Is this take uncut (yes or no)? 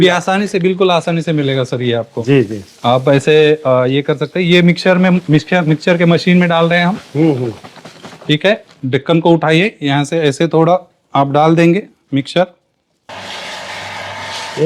no